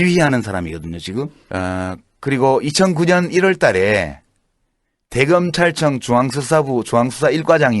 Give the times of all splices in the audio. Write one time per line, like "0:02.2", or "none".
0:01.4